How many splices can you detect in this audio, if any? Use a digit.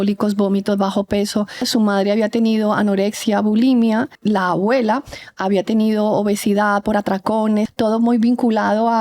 3